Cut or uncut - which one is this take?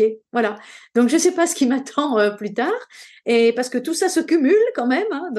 uncut